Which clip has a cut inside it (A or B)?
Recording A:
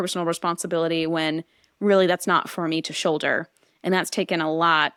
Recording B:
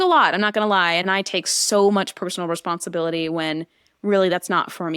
B